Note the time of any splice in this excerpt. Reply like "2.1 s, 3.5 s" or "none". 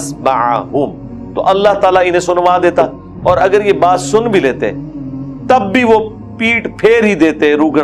3.0 s